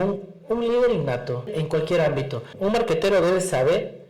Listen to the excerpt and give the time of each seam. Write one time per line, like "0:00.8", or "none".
0:01.5
0:02.5